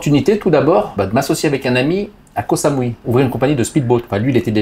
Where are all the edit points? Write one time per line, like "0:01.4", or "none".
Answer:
0:00.9
0:03.0